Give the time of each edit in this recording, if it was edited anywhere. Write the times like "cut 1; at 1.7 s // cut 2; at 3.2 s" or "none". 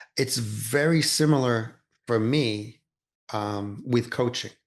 none